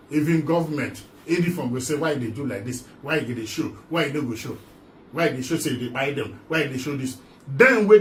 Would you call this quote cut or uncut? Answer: uncut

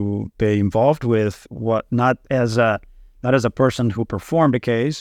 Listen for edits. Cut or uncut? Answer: uncut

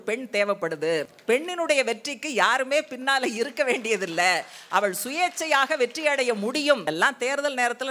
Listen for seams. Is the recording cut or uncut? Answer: cut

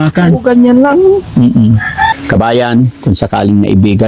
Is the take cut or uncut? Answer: cut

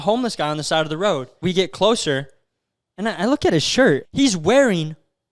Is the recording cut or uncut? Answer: cut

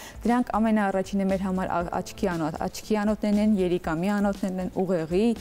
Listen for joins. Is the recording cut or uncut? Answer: uncut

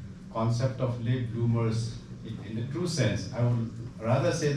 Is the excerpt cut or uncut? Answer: uncut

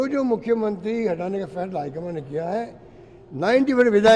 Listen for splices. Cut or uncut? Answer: uncut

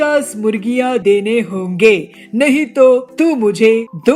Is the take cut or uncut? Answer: uncut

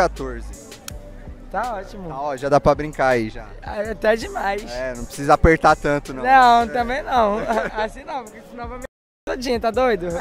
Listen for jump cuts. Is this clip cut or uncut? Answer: uncut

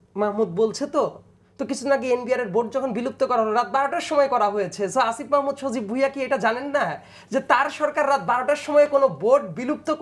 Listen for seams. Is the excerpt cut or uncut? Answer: uncut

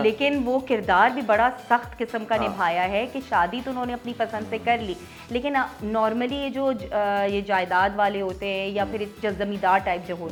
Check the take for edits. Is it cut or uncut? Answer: uncut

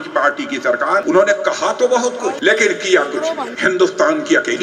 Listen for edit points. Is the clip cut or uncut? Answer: cut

